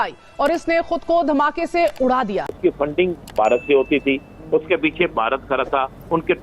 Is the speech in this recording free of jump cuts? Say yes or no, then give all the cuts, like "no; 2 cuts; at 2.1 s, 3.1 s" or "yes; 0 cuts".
no; 1 cut; at 2.5 s